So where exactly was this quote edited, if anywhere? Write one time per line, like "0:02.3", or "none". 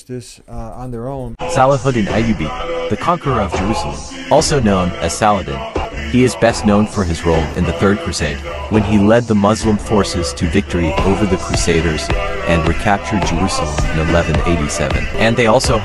none